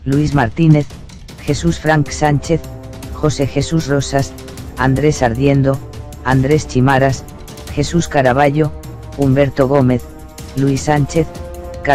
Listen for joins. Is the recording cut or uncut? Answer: uncut